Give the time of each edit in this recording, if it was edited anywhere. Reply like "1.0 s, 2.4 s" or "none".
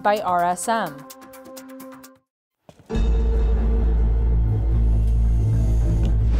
0.9 s, 2.0 s